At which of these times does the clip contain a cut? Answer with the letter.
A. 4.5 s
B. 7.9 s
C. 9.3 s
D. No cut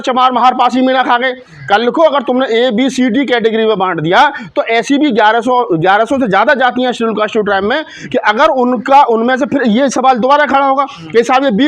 D